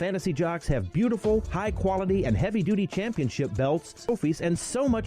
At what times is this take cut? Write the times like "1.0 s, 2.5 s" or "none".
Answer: 3.9 s